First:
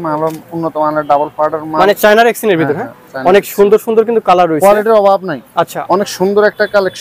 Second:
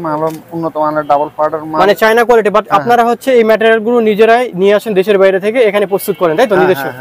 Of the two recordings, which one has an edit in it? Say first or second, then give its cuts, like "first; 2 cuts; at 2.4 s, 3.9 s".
first; 2 cuts; at 2.0 s, 5.8 s